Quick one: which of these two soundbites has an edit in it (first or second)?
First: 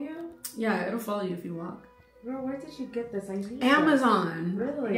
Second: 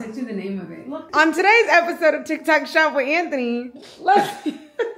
second